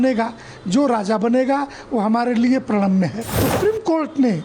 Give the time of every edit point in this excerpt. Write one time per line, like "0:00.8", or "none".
0:03.4